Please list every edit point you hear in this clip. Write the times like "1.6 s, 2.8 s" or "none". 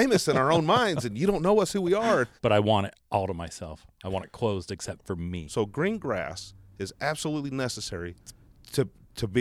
2.3 s, 5.4 s